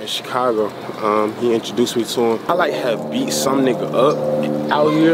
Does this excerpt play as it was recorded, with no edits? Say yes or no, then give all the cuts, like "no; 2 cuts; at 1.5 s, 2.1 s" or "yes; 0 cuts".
no; 1 cut; at 2.5 s